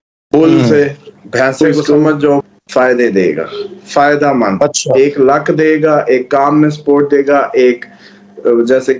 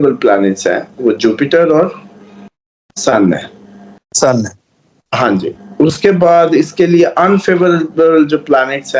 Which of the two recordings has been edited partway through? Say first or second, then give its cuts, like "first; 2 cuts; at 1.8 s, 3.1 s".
first; 1 cut; at 2.5 s